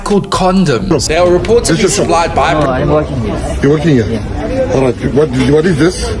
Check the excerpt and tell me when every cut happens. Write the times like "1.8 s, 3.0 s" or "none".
2.5 s